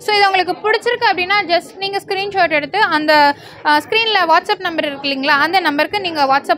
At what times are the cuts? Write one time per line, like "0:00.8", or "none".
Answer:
none